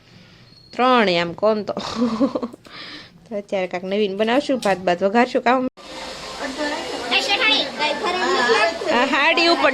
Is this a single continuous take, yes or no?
no